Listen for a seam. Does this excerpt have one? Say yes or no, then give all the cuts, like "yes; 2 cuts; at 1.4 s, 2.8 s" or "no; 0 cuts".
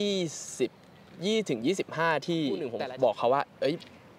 yes; 1 cut; at 2.7 s